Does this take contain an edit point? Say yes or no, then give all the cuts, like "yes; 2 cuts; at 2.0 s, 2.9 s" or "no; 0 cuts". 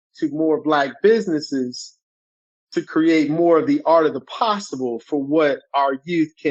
no; 0 cuts